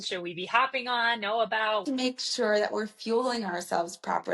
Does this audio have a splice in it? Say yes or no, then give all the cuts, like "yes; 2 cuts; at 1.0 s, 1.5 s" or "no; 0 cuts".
yes; 1 cut; at 1.8 s